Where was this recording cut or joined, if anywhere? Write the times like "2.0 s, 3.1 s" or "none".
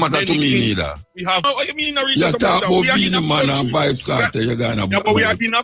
1.4 s